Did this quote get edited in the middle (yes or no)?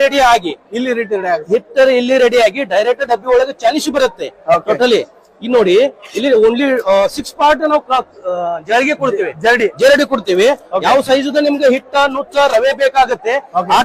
no